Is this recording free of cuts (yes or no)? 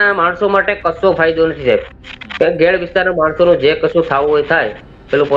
no